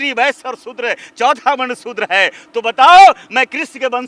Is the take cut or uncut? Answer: uncut